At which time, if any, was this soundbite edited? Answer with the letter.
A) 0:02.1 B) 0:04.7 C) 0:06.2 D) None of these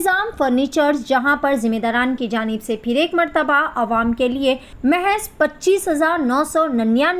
B